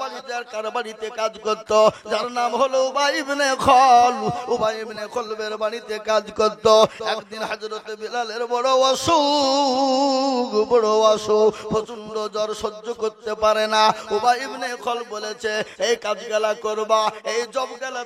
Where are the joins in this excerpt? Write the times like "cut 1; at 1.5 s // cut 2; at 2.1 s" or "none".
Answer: none